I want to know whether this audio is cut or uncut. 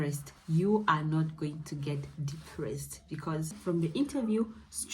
cut